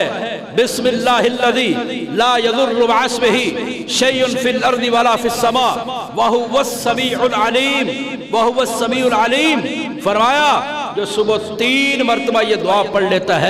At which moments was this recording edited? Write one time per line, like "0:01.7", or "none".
none